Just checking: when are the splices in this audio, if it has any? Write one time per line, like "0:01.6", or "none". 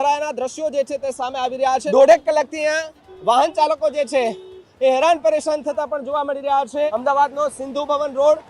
0:01.8
0:06.9